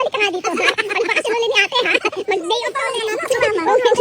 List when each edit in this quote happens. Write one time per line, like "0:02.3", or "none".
0:02.8

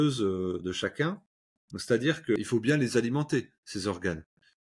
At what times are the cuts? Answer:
0:02.4

